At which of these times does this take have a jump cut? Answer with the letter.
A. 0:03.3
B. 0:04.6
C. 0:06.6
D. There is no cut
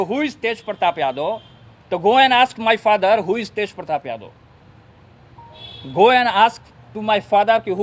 D